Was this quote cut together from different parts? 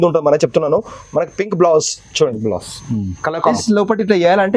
yes; 1 cut; at 3.5 s

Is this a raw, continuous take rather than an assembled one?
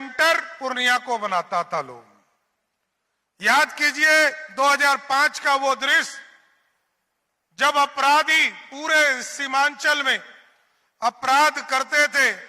yes; 0 cuts

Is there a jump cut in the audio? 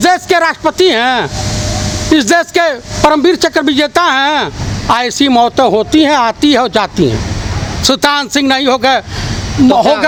no; 0 cuts

